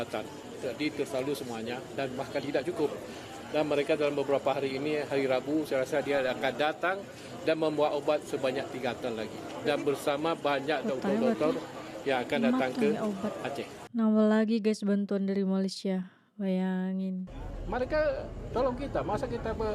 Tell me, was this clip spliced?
no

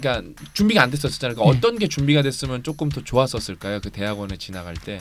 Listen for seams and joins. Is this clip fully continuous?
yes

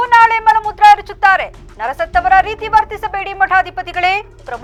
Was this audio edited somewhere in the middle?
no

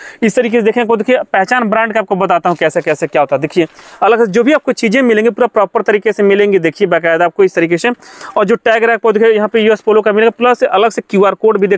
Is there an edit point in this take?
no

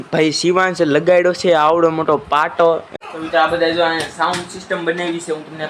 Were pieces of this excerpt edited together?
yes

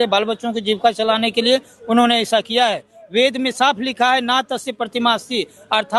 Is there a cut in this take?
no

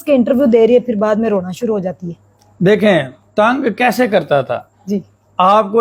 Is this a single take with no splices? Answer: yes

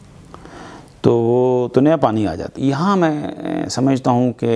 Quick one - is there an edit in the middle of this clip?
yes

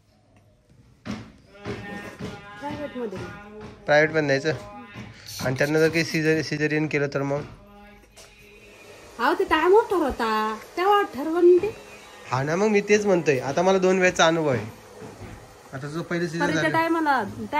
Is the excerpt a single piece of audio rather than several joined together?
yes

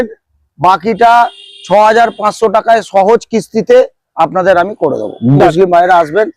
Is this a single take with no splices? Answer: no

